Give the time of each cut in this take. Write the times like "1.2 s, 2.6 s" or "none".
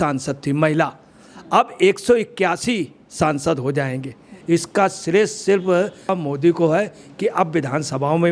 4.3 s, 6.1 s